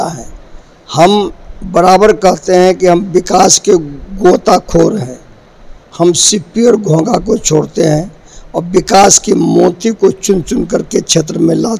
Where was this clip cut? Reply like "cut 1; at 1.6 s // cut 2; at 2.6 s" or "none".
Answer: none